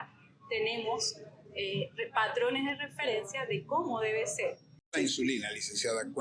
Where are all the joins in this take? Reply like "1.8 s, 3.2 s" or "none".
4.9 s